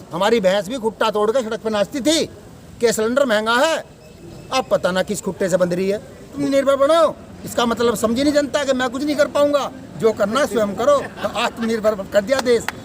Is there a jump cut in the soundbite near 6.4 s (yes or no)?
yes